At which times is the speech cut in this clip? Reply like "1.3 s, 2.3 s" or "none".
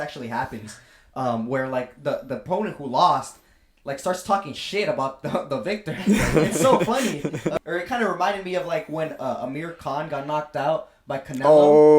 7.6 s